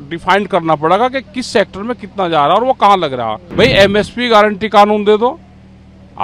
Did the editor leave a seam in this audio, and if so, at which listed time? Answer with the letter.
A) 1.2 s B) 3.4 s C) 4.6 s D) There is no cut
B